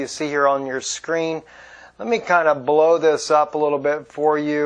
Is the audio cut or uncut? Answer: uncut